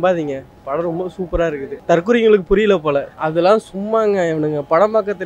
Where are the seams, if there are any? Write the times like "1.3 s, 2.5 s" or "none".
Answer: 1.7 s, 3.2 s